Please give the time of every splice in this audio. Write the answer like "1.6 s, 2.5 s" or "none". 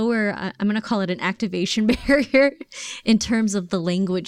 none

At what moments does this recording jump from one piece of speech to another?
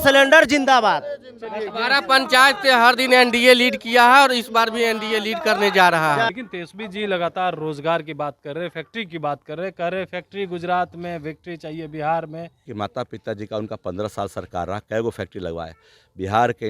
6.3 s, 12.6 s

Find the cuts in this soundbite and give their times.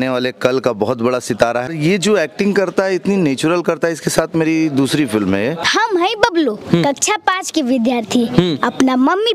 1.7 s, 5.6 s

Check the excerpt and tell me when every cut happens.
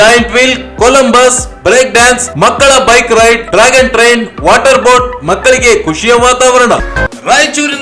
6.9 s

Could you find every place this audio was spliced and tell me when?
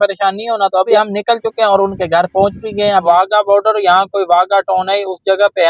0.9 s, 3.0 s

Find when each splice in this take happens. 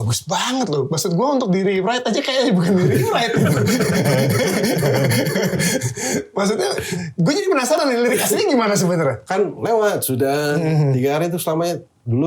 9.2 s

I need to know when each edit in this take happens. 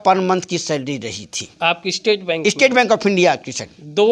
none

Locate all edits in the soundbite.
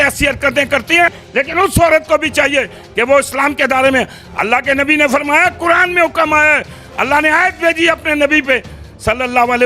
1.2 s

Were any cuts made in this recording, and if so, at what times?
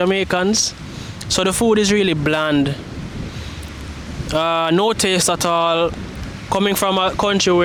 none

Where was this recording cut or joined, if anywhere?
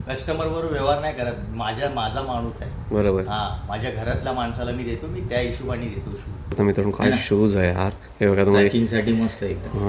6.6 s

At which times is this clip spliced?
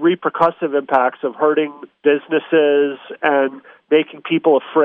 1.8 s

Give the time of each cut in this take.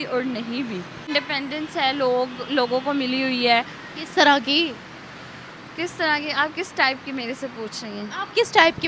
1.1 s

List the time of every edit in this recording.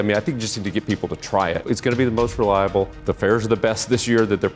1.6 s, 2.9 s

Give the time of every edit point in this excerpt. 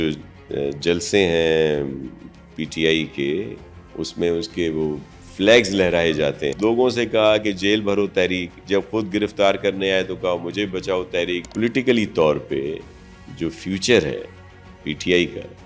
6.5 s, 11.4 s

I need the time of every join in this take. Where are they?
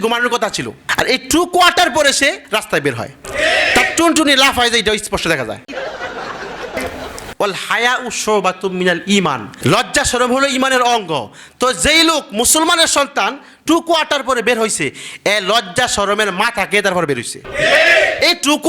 7.3 s

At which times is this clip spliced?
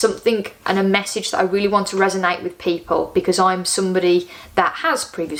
none

